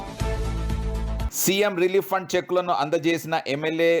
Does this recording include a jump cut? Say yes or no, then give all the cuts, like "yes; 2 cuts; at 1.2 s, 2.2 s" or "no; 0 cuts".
yes; 1 cut; at 1.3 s